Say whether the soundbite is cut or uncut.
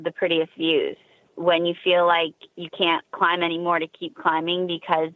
cut